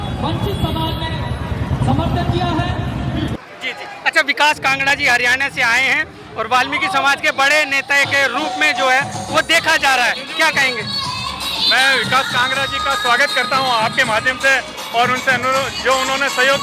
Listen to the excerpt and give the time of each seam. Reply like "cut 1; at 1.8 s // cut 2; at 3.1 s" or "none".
cut 1; at 3.4 s